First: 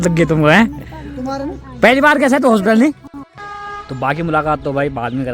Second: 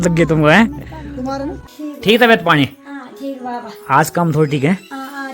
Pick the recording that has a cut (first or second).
second